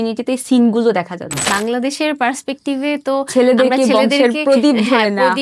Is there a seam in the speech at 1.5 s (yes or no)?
yes